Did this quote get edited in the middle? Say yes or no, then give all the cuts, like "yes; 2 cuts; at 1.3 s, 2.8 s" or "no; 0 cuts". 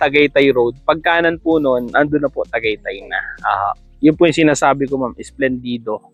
no; 0 cuts